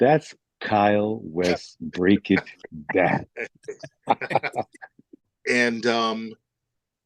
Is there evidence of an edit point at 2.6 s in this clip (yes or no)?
no